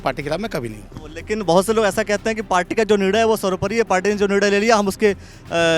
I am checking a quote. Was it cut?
no; 0 cuts

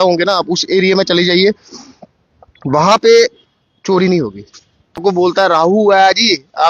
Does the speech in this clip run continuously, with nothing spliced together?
no; 1 cut; at 5.0 s

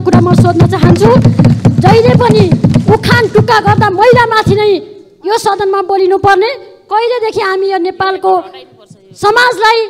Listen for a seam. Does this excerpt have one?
no; 0 cuts

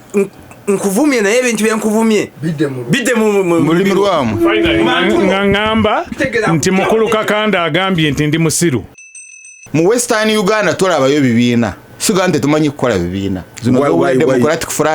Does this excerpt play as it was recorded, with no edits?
no; 3 cuts; at 9.2 s, 11.9 s, 13.4 s

